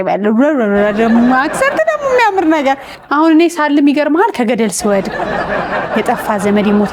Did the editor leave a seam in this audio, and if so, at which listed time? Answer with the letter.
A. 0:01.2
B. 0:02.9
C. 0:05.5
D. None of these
B